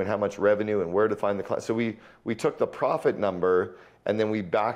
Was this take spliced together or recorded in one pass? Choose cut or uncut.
uncut